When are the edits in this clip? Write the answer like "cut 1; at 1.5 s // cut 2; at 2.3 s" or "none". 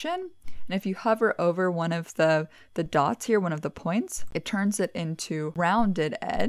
cut 1; at 4.2 s // cut 2; at 5.5 s

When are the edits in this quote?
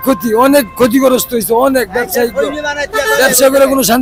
none

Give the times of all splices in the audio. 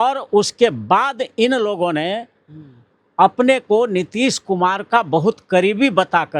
none

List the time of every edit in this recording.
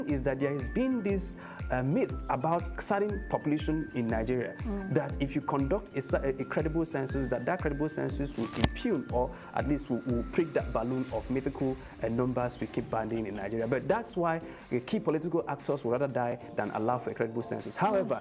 none

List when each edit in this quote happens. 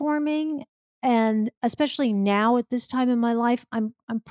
none

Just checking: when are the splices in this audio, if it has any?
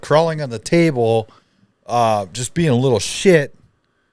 none

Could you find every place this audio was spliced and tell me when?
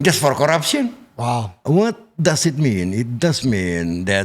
cut 1; at 1.6 s

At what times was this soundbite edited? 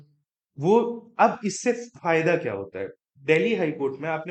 none

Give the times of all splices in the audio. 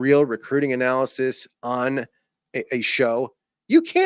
none

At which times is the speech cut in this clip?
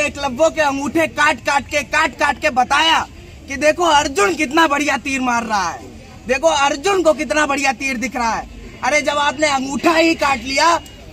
none

